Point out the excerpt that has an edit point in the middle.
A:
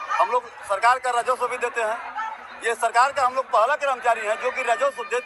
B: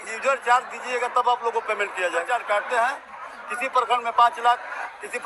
B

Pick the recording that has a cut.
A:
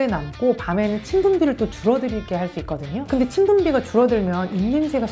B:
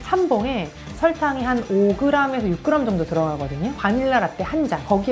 B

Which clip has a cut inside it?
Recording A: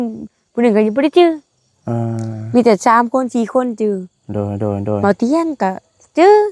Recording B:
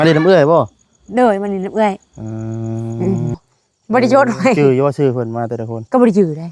B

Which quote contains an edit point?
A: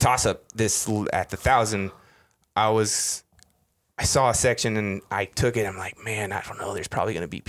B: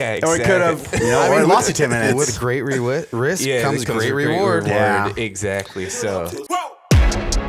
B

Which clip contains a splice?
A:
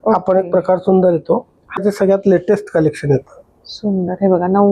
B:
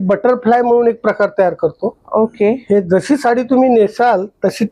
A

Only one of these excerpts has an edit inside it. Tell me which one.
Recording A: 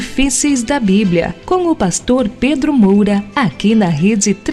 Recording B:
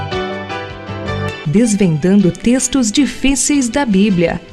A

